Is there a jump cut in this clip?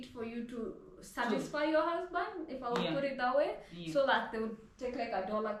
no; 0 cuts

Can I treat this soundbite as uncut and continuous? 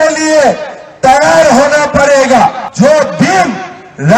no; 1 cut; at 2.6 s

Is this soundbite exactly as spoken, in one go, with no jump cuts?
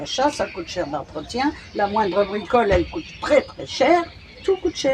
yes; 0 cuts

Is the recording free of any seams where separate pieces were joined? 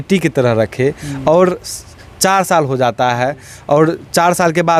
yes; 0 cuts

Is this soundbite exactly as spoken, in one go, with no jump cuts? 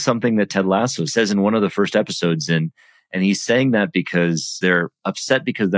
no; 2 cuts; at 1.0 s, 4.6 s

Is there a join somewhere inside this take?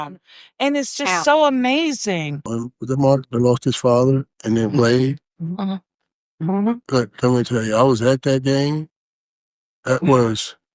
no; 0 cuts

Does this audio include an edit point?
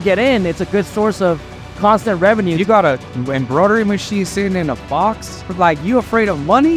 yes; 1 cut; at 2.6 s

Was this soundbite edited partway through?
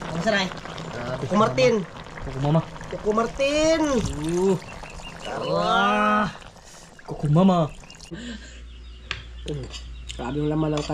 yes; 1 cut; at 8.2 s

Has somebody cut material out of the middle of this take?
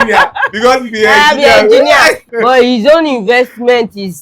yes; 1 cut; at 2.3 s

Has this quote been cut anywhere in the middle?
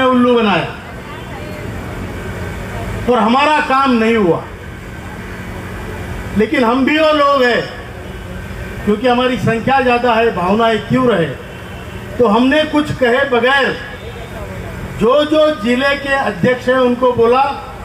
no; 0 cuts

